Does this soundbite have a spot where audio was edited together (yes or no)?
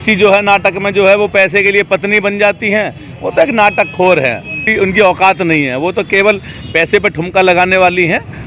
yes